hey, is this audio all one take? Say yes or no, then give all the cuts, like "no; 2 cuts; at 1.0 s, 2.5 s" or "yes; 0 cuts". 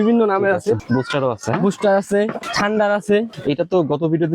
no; 3 cuts; at 0.8 s, 2.4 s, 3.3 s